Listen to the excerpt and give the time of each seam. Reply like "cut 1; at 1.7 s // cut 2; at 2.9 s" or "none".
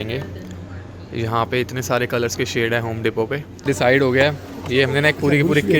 cut 1; at 3.6 s